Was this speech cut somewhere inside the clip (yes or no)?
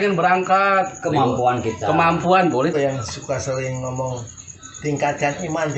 yes